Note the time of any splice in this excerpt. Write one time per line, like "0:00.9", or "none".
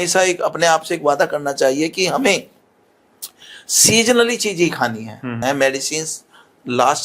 0:05.4